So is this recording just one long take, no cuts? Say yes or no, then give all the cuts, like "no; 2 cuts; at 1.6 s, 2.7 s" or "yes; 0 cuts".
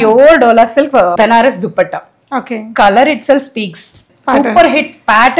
no; 2 cuts; at 1.1 s, 4.1 s